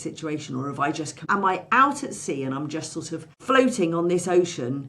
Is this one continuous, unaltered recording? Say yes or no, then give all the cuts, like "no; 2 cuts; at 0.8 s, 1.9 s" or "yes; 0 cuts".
no; 2 cuts; at 1.2 s, 3.3 s